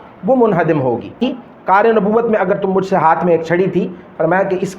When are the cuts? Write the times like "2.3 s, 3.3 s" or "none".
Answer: 1.2 s